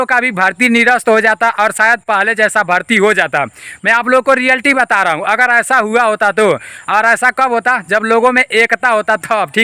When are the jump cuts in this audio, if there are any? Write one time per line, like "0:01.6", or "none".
none

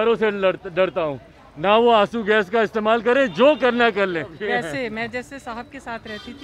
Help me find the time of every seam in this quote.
0:04.4

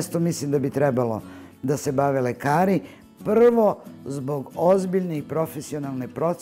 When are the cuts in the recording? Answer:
none

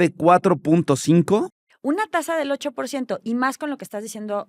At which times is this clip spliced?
0:01.6

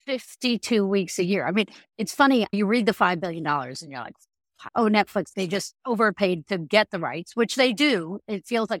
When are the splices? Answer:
0:02.5
0:04.6
0:05.3

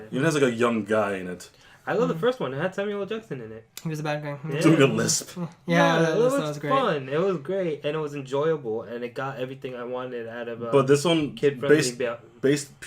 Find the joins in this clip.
0:06.0

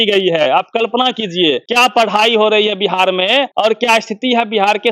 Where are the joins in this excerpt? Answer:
0:01.7
0:03.5

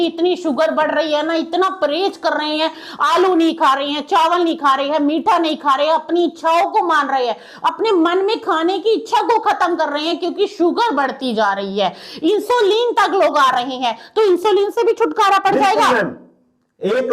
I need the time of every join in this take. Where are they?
none

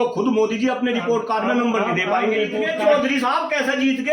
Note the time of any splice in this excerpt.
0:02.7

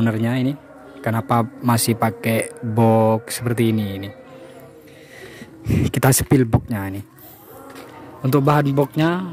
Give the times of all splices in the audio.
none

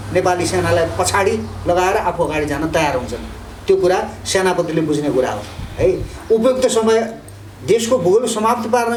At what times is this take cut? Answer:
none

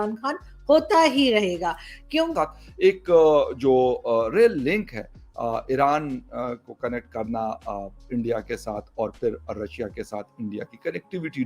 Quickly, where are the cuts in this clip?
0:02.3

